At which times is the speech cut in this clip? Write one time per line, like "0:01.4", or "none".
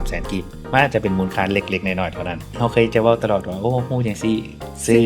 none

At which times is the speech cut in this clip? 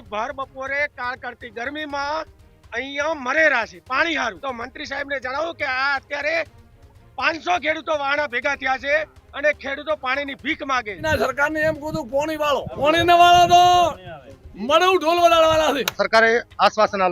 0:04.4
0:11.0
0:12.7
0:15.9

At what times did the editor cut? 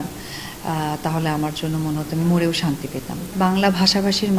0:03.3

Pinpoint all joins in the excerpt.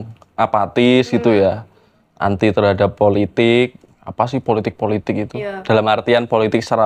none

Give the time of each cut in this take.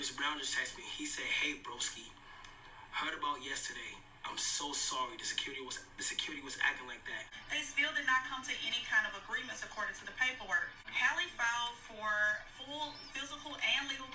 0:07.3
0:10.8

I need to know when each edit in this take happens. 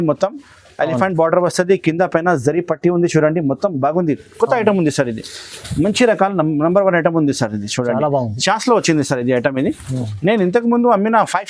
none

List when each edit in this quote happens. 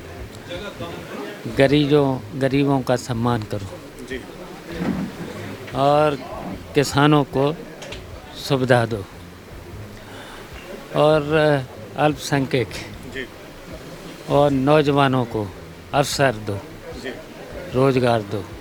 none

